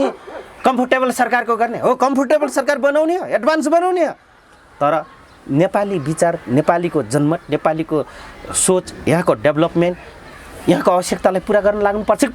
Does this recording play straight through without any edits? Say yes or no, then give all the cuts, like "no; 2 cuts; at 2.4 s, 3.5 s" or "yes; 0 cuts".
yes; 0 cuts